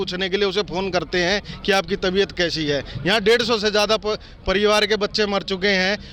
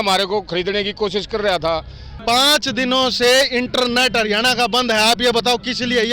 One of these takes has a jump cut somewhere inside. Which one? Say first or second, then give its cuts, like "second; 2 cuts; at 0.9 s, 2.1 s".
second; 1 cut; at 2.1 s